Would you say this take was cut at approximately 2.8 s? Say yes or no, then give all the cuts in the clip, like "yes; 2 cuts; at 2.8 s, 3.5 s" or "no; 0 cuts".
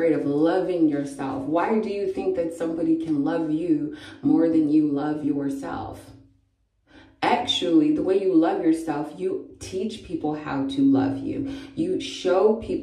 no; 0 cuts